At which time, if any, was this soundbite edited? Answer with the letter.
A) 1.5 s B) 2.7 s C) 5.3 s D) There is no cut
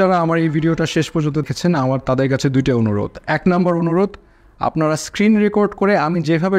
A